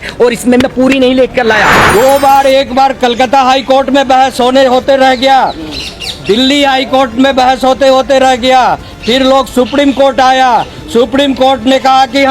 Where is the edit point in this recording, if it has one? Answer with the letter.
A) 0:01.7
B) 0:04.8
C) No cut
A